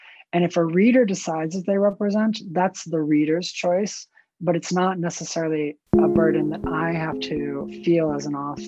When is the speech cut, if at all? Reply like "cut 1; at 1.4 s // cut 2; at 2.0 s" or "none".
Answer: cut 1; at 7.7 s